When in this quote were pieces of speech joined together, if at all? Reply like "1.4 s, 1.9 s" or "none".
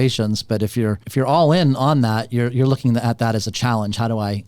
1.0 s